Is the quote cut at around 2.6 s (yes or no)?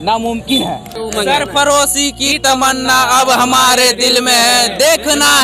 no